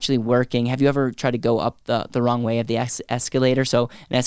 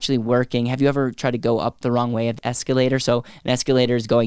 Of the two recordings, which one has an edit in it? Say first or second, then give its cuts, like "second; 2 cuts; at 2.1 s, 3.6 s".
second; 1 cut; at 2.2 s